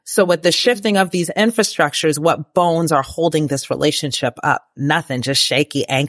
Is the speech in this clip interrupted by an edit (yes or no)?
no